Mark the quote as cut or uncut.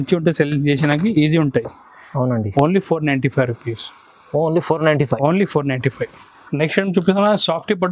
uncut